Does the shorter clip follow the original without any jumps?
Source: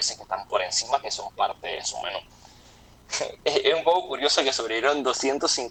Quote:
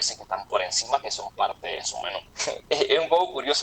no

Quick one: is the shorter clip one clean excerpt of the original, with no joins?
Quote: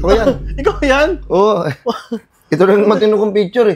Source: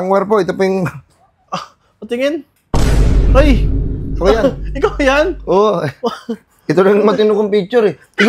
yes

